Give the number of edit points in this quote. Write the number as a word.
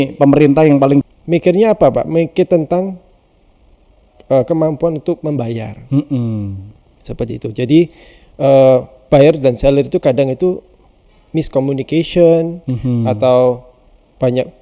one